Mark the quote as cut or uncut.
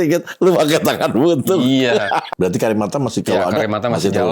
cut